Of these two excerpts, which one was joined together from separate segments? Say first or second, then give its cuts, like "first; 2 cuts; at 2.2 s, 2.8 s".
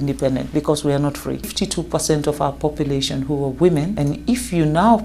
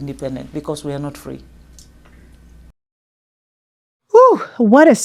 first; 2 cuts; at 1.5 s, 3.9 s